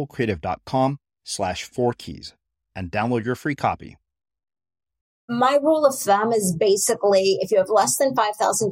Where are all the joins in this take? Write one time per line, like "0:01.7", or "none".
0:05.2